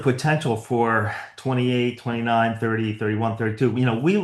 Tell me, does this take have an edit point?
no; 0 cuts

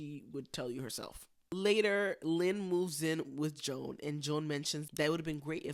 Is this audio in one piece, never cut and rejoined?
yes; 0 cuts

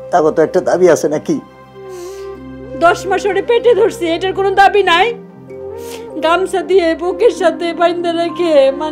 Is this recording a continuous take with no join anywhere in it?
yes; 0 cuts

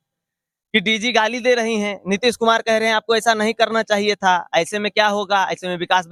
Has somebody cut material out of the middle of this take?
no; 0 cuts

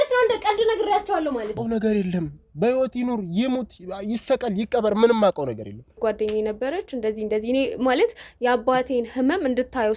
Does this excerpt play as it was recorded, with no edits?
no; 2 cuts; at 1.5 s, 6.0 s

